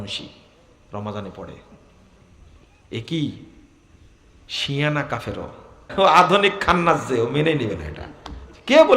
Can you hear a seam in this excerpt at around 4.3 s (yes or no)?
no